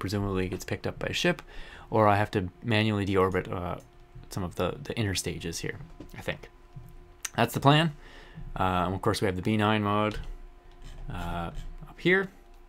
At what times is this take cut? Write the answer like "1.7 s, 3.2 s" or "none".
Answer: 2.3 s

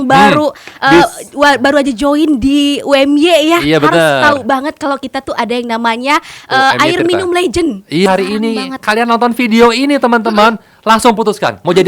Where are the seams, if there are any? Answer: 8.1 s

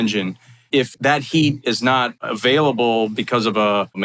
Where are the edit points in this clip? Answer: 0.8 s, 2.2 s

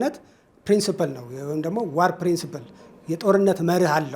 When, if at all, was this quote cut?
none

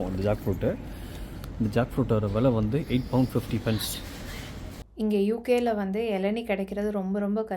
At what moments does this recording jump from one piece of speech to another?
4.8 s

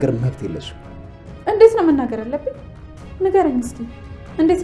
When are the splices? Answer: none

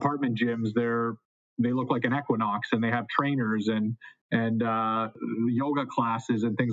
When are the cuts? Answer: 5.2 s

